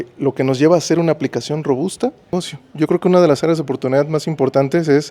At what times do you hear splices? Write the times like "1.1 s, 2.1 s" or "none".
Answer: 2.3 s